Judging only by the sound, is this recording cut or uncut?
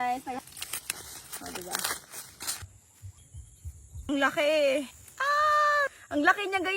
cut